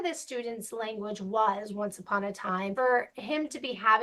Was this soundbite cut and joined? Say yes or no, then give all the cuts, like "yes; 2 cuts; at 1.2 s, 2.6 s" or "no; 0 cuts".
yes; 1 cut; at 2.7 s